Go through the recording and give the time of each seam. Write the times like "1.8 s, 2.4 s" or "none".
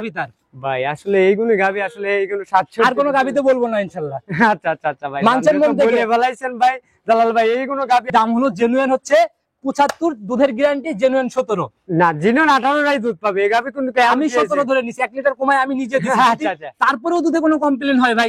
8.1 s